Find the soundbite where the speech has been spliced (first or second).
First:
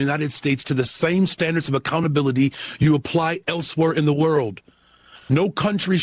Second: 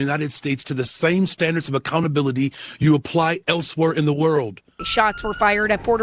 second